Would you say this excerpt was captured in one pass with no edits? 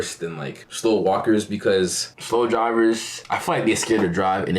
no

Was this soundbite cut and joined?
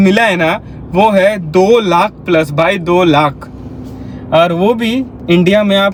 no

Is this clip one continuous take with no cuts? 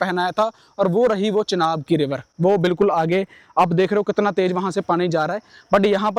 yes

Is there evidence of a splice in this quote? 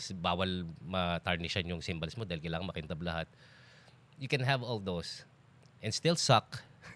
no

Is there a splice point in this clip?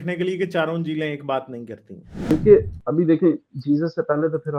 yes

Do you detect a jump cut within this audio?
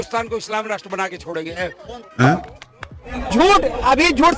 yes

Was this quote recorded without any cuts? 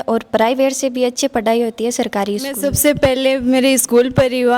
no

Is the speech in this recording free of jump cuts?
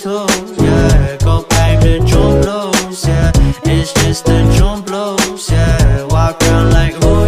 no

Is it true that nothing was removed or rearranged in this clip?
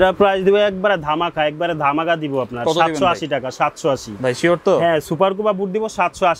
yes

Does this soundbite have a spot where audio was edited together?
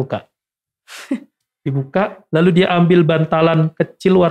no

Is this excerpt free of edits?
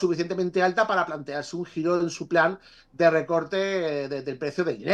yes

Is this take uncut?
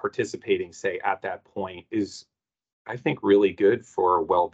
no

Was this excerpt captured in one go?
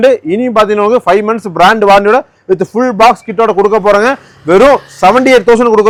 yes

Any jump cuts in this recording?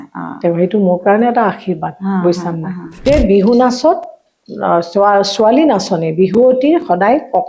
yes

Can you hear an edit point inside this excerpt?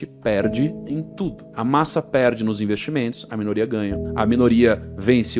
no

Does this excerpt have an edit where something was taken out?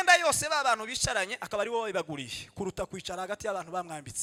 no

